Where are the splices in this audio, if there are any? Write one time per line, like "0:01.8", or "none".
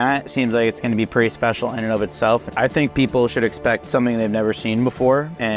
0:02.5

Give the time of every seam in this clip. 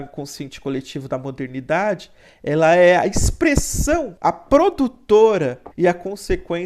0:04.1
0:05.6

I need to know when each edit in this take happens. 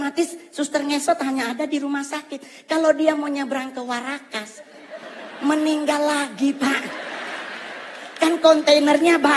none

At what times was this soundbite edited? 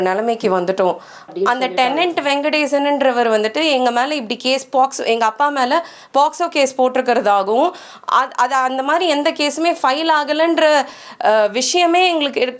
0:01.3

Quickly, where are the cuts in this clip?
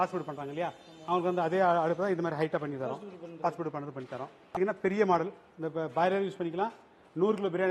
0:04.6

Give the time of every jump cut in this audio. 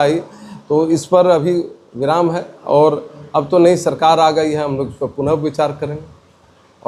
none

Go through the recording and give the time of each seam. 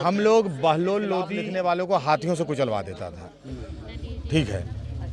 0:01.4

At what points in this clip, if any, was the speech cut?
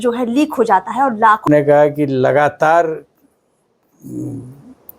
0:01.4

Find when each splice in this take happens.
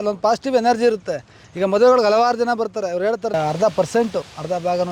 0:03.3

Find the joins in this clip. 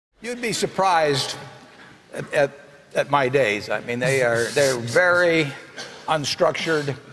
none

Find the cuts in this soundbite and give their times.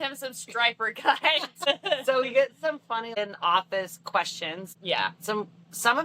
0:01.7
0:03.2
0:04.7

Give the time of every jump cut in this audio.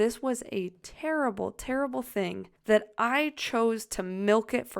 0:02.5

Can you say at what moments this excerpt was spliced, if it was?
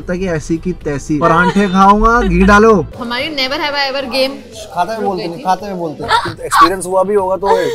0:01.2
0:03.0
0:06.0

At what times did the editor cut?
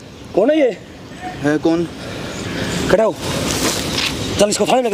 none

